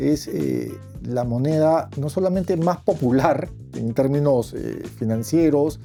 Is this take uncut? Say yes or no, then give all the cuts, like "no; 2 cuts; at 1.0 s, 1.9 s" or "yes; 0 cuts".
yes; 0 cuts